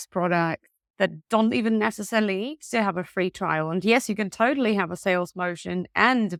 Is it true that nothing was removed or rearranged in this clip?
yes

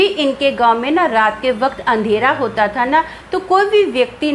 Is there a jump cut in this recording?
no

